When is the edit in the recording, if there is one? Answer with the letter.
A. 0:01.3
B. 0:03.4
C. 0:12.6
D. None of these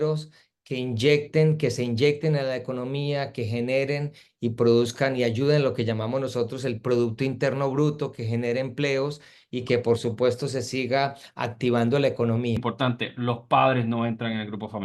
C